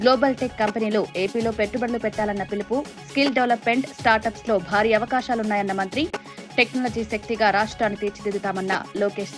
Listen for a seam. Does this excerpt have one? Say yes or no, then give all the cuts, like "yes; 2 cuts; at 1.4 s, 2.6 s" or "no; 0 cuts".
no; 0 cuts